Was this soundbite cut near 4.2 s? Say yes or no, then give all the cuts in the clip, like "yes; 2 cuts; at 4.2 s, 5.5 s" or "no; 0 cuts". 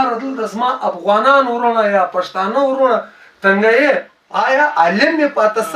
yes; 1 cut; at 4.2 s